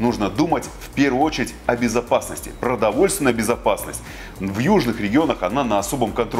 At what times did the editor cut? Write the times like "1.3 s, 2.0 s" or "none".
none